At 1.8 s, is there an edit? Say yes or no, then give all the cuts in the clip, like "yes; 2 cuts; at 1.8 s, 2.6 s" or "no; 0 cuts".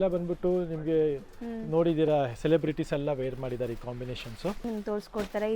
no; 1 cut; at 4.6 s